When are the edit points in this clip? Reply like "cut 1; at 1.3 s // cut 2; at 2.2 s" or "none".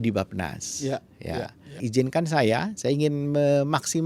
cut 1; at 1.8 s